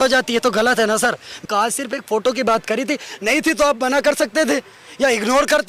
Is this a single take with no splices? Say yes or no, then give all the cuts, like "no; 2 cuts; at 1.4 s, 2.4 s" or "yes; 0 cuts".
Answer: no; 1 cut; at 1.5 s